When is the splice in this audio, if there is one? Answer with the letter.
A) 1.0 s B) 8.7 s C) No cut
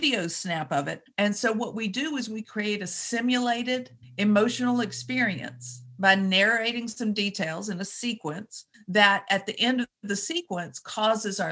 A